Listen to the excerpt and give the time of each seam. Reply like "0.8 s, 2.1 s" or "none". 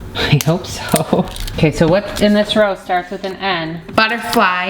1.5 s, 3.8 s